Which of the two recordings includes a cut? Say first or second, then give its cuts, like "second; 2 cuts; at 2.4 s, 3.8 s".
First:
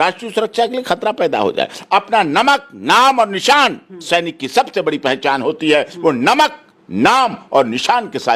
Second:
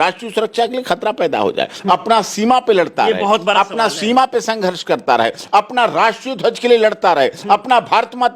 first; 1 cut; at 1.8 s